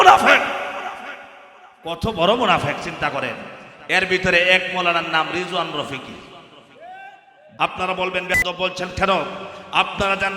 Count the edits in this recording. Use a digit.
1